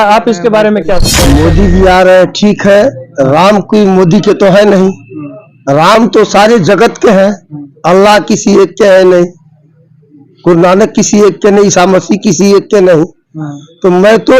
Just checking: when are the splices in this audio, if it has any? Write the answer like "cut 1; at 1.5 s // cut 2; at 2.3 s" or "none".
cut 1; at 1.1 s